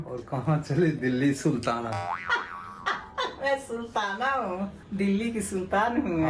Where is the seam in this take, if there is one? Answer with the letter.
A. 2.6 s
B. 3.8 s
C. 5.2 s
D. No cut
D